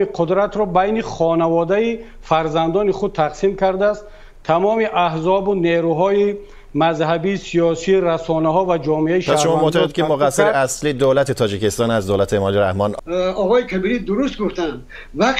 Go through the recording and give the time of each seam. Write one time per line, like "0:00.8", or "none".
0:12.9